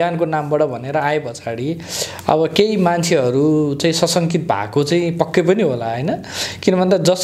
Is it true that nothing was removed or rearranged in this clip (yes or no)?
yes